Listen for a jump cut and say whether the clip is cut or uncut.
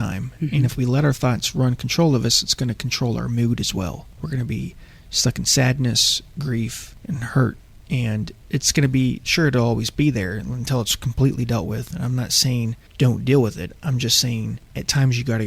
cut